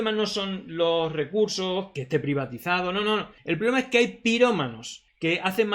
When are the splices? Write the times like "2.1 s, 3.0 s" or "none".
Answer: 2.0 s, 3.3 s